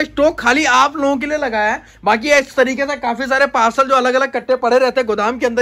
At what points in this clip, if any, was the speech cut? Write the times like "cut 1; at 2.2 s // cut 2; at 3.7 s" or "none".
none